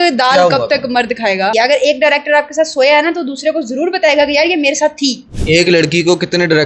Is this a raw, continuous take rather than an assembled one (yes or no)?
no